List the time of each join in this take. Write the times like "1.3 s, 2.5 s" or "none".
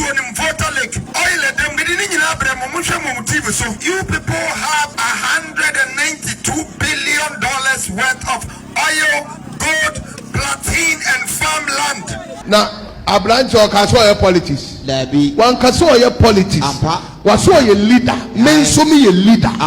1.1 s, 1.8 s, 3.8 s, 4.9 s, 12.4 s